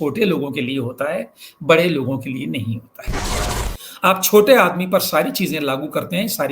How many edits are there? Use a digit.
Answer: 1